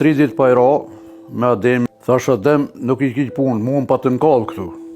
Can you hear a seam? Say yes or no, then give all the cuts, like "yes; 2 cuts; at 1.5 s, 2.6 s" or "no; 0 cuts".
yes; 1 cut; at 1.9 s